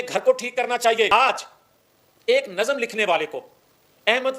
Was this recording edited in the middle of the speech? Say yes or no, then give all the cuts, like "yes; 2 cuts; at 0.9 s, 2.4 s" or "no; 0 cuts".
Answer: yes; 1 cut; at 1.1 s